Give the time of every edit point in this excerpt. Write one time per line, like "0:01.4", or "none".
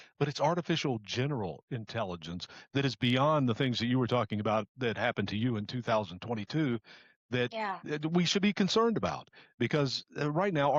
none